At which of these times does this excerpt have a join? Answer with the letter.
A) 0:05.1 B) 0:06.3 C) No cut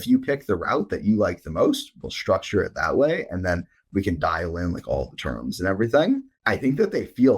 B